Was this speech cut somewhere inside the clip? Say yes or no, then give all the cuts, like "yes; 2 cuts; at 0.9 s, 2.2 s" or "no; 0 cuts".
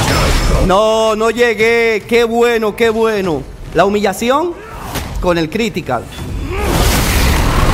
no; 0 cuts